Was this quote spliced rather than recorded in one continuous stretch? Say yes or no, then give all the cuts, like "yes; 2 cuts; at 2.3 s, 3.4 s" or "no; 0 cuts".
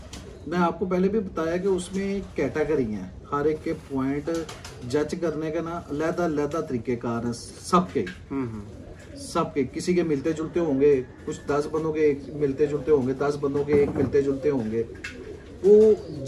no; 0 cuts